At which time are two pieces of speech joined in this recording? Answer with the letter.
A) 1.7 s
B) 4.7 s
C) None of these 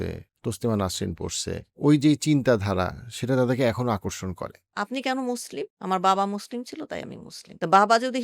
B